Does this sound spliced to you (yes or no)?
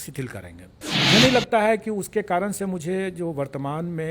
yes